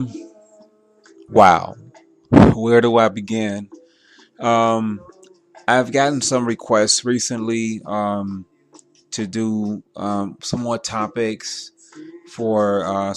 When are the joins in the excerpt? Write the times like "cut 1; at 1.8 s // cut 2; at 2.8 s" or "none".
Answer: cut 1; at 11.5 s